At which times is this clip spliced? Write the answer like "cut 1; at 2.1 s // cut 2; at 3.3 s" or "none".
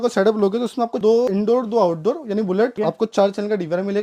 none